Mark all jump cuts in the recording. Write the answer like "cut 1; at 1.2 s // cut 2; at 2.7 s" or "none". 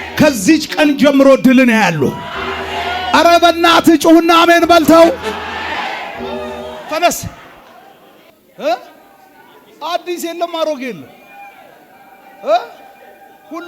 cut 1; at 6.8 s